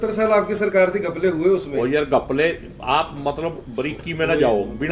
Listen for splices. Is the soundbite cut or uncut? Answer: uncut